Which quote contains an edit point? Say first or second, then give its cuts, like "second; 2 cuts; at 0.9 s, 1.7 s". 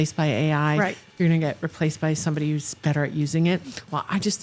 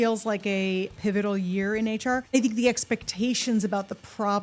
second; 2 cuts; at 0.9 s, 2.3 s